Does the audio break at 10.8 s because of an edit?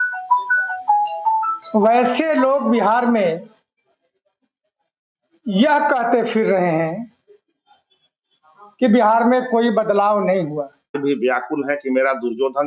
yes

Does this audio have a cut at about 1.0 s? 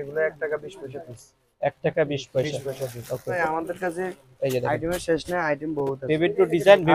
no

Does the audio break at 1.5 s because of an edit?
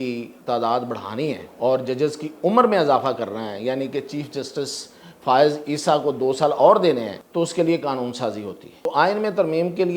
yes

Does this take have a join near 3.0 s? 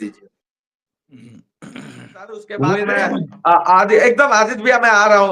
yes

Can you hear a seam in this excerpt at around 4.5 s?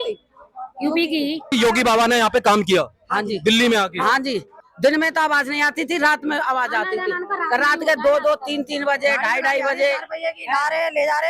yes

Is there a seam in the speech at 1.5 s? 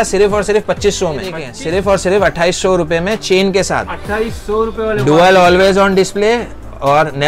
yes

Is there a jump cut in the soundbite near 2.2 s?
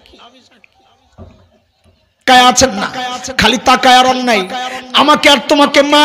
yes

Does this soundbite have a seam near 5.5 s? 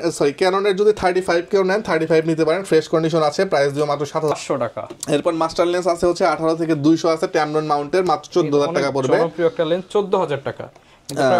no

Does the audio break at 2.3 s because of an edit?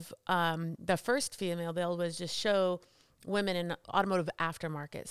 no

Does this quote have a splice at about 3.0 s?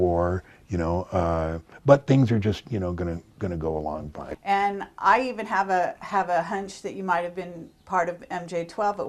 no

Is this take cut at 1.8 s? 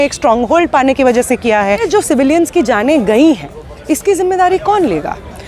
yes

